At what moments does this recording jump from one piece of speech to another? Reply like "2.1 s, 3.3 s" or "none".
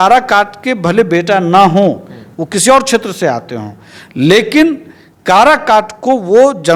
none